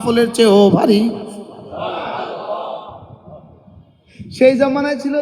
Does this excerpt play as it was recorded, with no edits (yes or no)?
yes